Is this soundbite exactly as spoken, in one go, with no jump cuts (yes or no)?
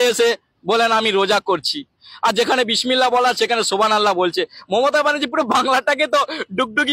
yes